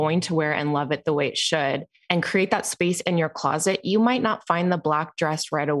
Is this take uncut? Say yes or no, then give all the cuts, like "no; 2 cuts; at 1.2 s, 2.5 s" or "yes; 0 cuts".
no; 1 cut; at 1.9 s